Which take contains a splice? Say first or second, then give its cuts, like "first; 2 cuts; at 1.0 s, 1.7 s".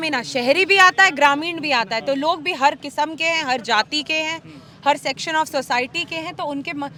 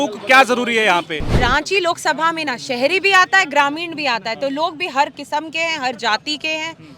second; 1 cut; at 1.4 s